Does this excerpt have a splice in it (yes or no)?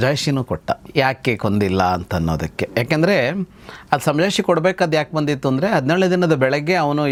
no